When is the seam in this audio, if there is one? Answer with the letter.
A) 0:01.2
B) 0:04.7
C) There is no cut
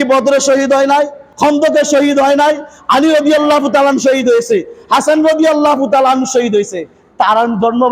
A